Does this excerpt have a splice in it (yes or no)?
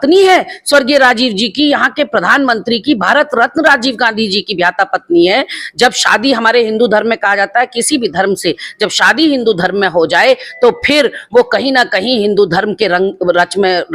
no